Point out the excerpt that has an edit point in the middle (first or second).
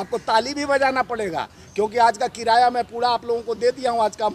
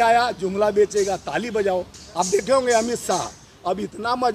second